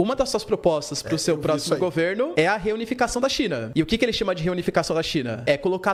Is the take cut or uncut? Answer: uncut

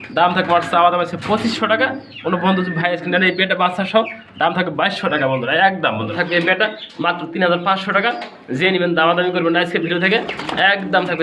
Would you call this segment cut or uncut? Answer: cut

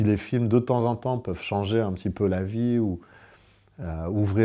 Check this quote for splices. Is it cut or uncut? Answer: uncut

